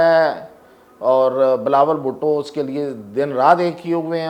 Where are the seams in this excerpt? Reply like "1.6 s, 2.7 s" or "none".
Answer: none